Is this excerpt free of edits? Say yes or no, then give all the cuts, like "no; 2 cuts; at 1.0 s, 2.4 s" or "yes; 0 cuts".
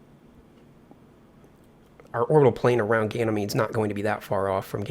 no; 1 cut; at 1.3 s